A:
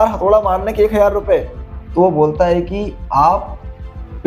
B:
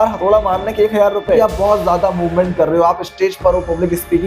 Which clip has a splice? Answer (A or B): B